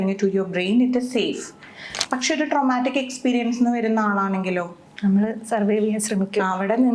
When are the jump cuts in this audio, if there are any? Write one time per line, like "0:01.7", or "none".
0:01.9